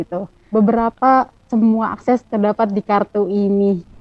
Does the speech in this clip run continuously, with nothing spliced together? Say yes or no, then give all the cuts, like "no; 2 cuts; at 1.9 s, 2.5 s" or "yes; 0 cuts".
yes; 0 cuts